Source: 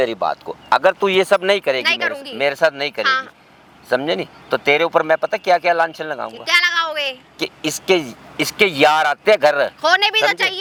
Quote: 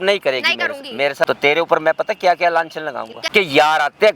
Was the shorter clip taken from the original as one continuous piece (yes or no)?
no